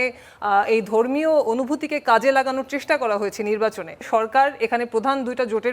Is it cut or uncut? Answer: cut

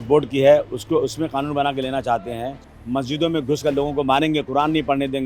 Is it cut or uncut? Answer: cut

